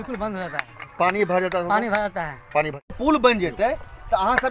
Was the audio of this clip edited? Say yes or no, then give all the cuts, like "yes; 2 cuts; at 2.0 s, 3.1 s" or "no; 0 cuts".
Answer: yes; 1 cut; at 3.0 s